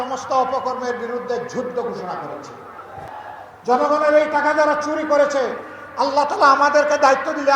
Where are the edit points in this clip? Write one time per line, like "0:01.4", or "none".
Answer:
0:03.0